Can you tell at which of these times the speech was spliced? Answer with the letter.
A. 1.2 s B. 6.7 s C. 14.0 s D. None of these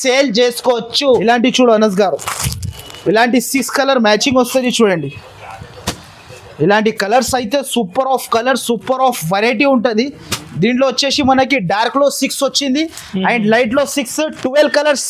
A